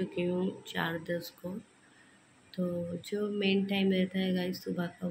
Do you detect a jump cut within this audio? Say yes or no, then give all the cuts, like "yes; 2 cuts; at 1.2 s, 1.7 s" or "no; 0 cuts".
no; 0 cuts